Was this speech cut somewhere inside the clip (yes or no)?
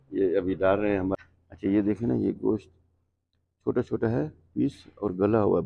yes